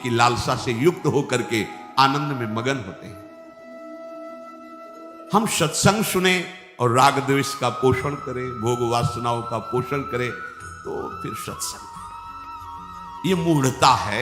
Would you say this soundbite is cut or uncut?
cut